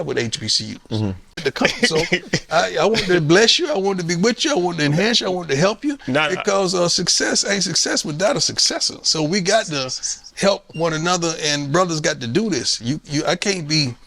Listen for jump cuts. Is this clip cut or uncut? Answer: cut